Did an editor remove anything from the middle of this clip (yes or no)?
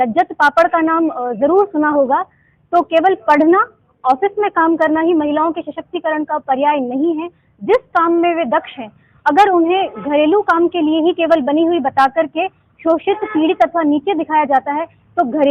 no